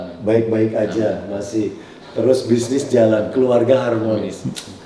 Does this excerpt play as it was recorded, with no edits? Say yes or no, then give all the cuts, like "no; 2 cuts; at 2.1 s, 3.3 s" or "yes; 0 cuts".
yes; 0 cuts